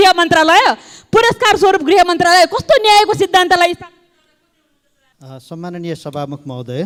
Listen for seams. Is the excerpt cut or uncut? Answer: uncut